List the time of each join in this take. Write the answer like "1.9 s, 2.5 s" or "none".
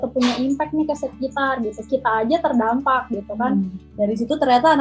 3.8 s